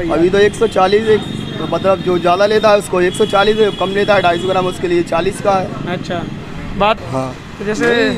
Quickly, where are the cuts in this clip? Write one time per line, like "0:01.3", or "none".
0:07.0